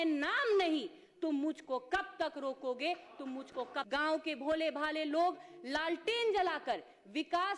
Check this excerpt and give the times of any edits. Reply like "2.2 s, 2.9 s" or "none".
3.8 s

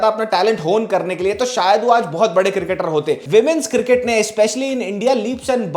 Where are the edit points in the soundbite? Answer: 3.2 s

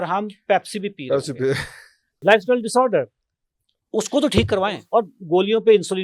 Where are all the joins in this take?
2.1 s, 4.6 s

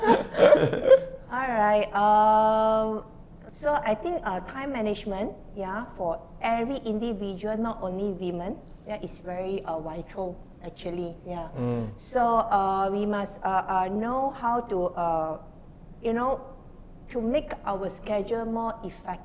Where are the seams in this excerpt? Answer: none

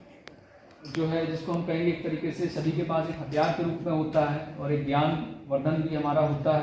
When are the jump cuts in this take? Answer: none

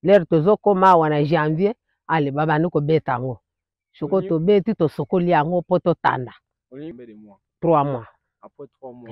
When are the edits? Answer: 6.9 s

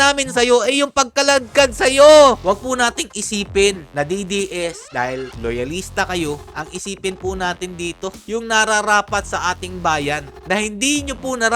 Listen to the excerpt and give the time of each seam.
2.4 s, 5.0 s

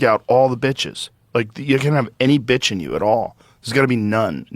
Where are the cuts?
none

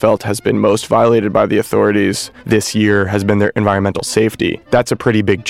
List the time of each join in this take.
2.3 s, 4.6 s

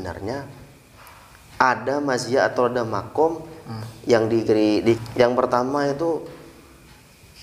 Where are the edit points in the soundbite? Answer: 5.0 s

